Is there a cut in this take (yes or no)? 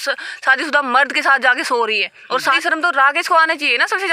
yes